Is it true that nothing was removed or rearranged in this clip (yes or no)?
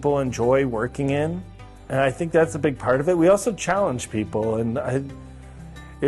yes